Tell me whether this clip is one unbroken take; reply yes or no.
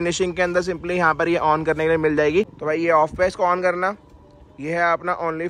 no